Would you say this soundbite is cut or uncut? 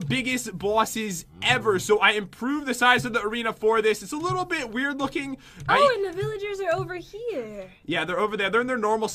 cut